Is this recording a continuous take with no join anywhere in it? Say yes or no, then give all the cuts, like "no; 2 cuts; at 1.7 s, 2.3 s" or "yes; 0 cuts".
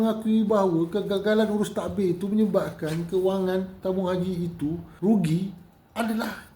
no; 1 cut; at 4.9 s